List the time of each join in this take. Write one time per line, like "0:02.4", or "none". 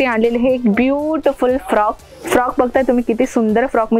none

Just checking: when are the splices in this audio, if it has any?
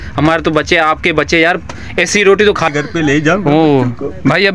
0:02.7

